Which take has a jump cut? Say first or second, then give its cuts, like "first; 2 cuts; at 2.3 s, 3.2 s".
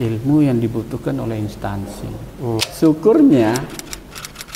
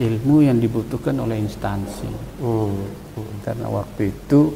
first; 1 cut; at 2.6 s